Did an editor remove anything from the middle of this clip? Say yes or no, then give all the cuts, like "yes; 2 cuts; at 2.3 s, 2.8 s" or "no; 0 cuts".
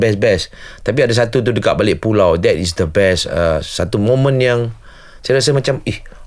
no; 0 cuts